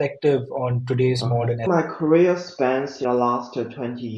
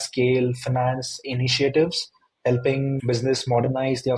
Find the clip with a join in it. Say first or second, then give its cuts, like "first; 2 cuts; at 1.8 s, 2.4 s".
first; 2 cuts; at 1.6 s, 3.0 s